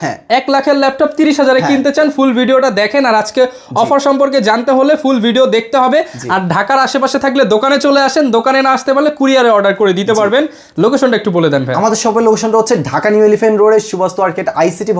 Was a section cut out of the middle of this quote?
no; 0 cuts

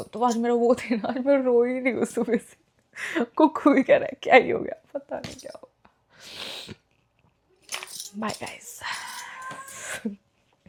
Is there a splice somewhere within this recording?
no; 0 cuts

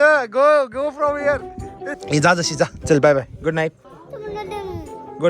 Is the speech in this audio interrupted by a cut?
yes; 1 cut; at 1.9 s

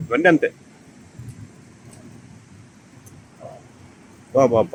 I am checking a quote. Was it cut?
no; 0 cuts

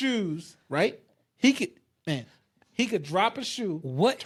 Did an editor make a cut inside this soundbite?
no; 0 cuts

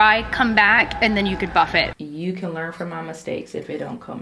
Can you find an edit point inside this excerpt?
yes; 1 cut; at 1.9 s

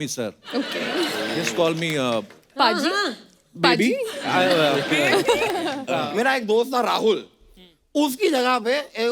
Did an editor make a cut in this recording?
yes; 1 cut; at 5.9 s

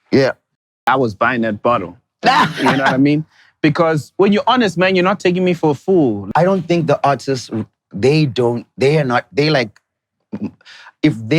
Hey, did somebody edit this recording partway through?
yes; 1 cut; at 6.3 s

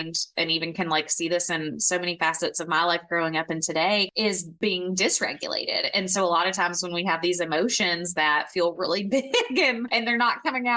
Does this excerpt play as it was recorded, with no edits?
no; 1 cut; at 4.5 s

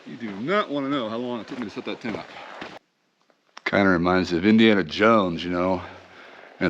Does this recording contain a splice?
yes; 1 cut; at 2.7 s

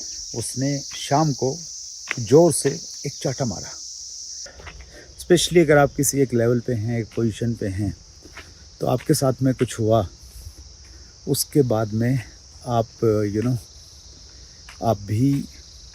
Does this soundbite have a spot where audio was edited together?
yes; 1 cut; at 4.4 s

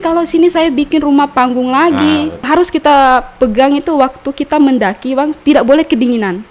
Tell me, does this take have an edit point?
yes; 1 cut; at 2.5 s

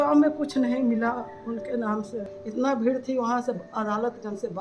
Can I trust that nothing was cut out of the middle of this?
no; 1 cut; at 2.4 s

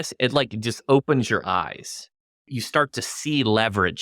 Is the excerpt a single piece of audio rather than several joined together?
no; 1 cut; at 2.5 s

